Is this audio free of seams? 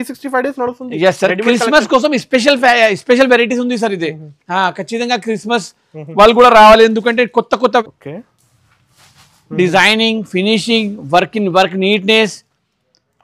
no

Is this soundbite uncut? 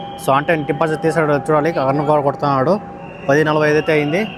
yes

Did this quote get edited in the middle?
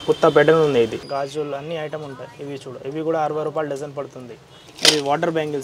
yes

